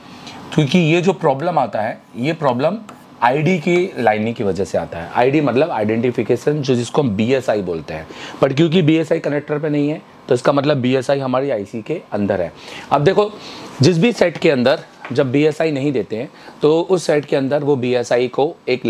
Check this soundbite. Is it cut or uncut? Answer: uncut